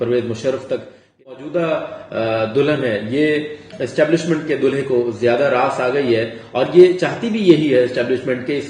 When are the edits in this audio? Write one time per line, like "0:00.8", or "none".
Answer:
0:01.3